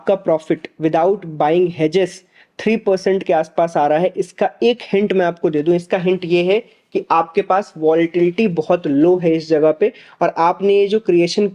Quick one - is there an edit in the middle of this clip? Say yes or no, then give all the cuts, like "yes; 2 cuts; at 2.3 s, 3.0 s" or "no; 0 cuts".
no; 0 cuts